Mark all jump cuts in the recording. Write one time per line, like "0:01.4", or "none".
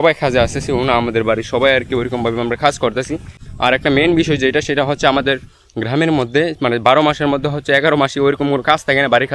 0:03.4